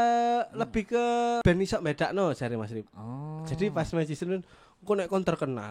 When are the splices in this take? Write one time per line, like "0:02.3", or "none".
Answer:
none